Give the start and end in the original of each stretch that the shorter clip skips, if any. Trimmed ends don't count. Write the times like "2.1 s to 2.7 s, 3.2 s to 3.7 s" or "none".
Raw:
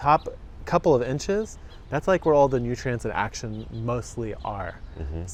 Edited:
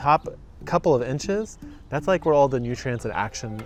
none